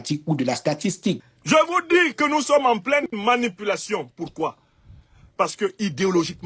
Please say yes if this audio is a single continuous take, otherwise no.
no